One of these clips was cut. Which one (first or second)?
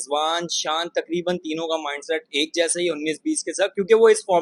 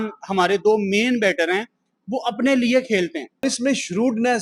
second